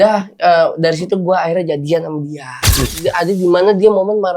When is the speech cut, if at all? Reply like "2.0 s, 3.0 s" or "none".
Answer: 2.9 s